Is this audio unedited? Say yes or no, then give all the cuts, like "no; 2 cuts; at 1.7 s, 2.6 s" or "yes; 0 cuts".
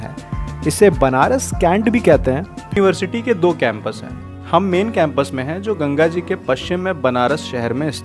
no; 1 cut; at 2.7 s